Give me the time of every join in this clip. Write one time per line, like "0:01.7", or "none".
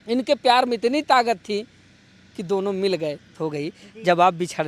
0:03.4